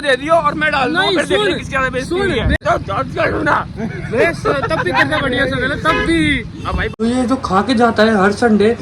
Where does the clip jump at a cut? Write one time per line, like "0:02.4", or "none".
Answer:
0:02.6
0:07.0